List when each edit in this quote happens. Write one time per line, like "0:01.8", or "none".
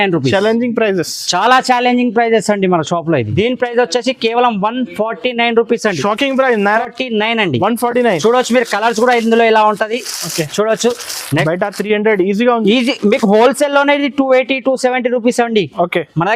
0:03.3
0:06.8
0:11.4